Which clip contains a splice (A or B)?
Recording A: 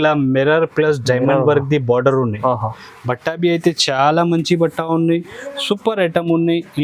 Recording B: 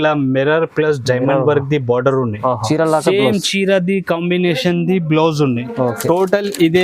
B